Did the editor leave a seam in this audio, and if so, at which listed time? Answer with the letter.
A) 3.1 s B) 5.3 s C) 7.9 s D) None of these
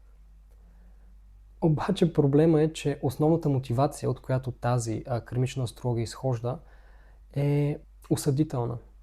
C